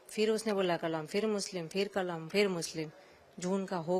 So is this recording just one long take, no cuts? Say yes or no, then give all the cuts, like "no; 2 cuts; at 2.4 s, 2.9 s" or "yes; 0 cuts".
yes; 0 cuts